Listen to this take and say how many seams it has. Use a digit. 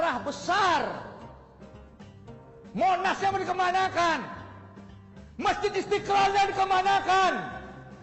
0